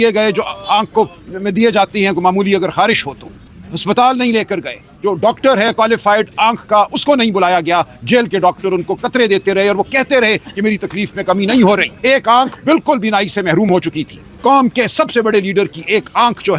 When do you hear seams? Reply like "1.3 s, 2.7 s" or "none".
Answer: 3.5 s, 11.9 s, 14.2 s